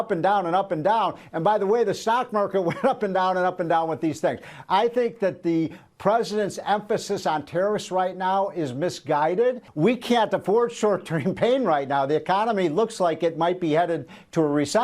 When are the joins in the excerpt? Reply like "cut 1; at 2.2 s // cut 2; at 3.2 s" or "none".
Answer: cut 1; at 9.7 s